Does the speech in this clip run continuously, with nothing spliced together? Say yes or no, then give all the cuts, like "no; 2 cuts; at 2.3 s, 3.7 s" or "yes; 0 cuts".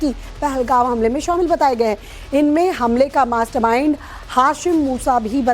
no; 1 cut; at 2.8 s